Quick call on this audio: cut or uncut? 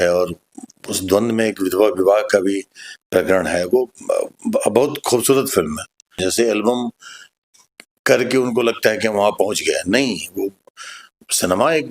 cut